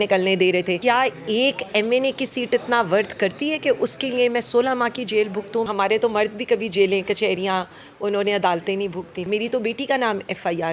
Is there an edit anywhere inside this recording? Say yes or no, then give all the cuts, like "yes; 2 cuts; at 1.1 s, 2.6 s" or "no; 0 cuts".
yes; 3 cuts; at 0.8 s, 5.7 s, 9.2 s